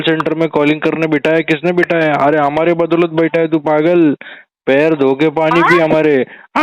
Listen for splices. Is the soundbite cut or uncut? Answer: uncut